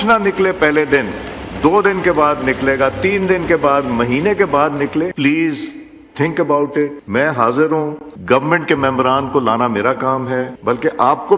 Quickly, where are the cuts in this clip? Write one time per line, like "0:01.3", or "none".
0:05.1
0:07.0
0:08.1
0:10.5